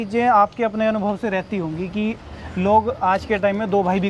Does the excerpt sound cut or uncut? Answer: uncut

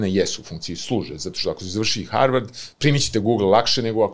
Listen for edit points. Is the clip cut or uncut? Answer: uncut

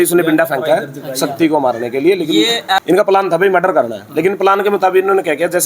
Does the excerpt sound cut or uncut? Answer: cut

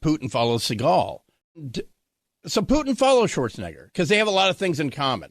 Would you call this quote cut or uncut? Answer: cut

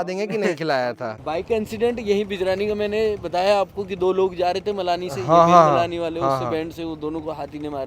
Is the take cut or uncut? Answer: cut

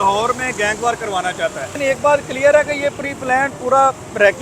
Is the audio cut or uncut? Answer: cut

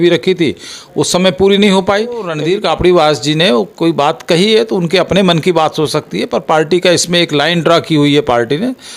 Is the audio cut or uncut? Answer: cut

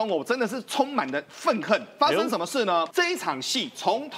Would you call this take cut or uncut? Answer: cut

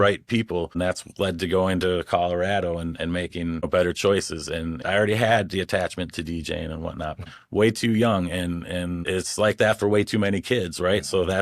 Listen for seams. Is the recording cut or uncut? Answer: cut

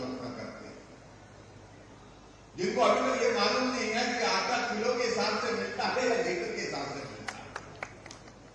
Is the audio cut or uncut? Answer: uncut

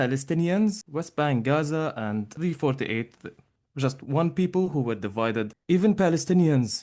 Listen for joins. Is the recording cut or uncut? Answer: cut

